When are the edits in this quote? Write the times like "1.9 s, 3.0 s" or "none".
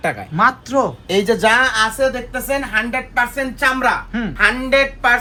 none